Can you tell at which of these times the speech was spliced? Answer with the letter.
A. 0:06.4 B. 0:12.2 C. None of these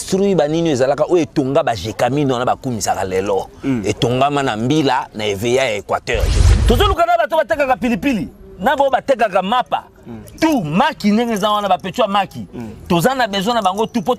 A